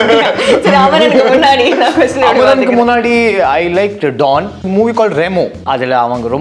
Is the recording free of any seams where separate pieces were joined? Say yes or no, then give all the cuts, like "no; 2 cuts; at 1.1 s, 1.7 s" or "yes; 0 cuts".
no; 2 cuts; at 4.6 s, 5.6 s